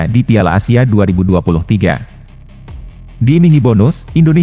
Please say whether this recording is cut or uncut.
cut